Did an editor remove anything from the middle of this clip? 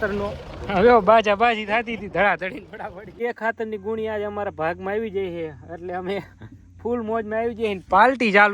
yes; 1 cut; at 3.2 s

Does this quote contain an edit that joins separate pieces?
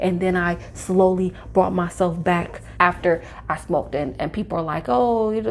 yes; 1 cut; at 2.6 s

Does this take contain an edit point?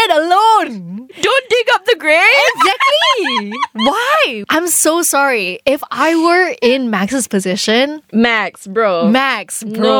yes; 2 cuts; at 1.1 s, 4.4 s

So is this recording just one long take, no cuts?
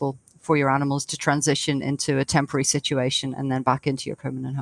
yes; 0 cuts

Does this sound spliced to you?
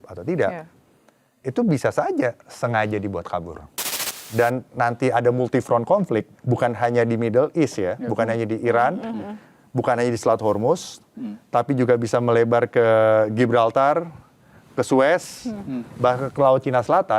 yes; 1 cut; at 4.2 s

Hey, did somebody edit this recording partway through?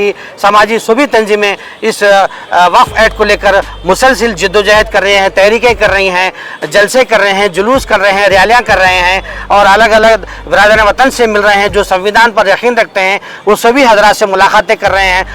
no; 0 cuts

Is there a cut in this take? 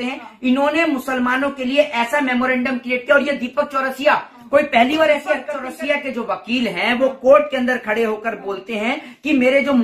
yes; 1 cut; at 5.6 s

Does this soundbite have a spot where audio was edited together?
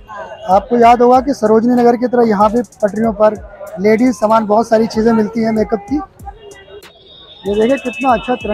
yes; 1 cut; at 6.8 s

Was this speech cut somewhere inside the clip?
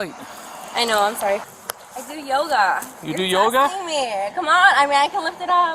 yes; 1 cut; at 1.5 s

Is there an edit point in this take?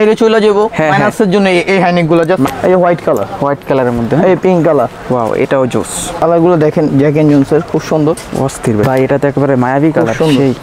yes; 3 cuts; at 2.5 s, 6.1 s, 8.8 s

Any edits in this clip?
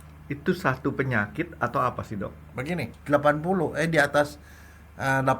yes; 1 cut; at 2.9 s

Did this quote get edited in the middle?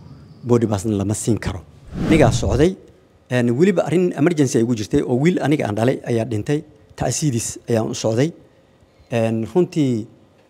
yes; 1 cut; at 1.9 s

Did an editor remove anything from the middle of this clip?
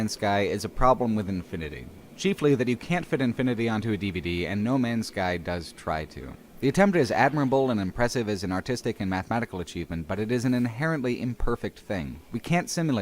yes; 1 cut; at 9.7 s

